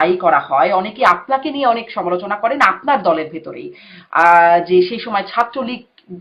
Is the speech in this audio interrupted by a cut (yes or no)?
no